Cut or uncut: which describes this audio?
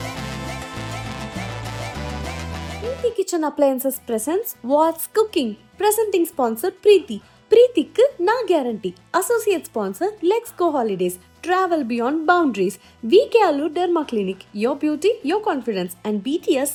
uncut